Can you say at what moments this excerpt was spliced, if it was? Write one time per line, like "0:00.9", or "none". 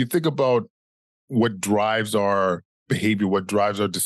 0:01.2